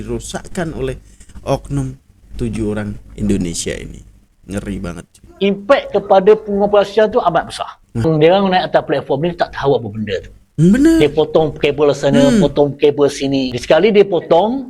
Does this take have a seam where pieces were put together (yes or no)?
yes